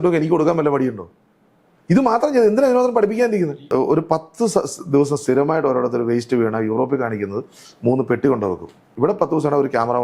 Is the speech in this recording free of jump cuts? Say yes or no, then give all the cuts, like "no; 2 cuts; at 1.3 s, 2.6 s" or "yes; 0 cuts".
no; 2 cuts; at 3.6 s, 8.8 s